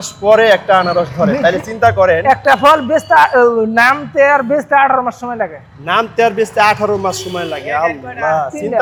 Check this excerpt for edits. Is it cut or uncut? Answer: uncut